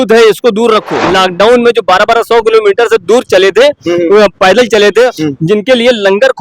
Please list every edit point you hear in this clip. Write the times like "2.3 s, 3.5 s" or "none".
1.0 s, 5.2 s